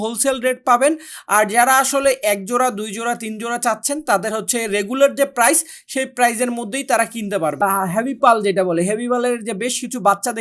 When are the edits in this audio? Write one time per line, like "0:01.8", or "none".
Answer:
0:07.6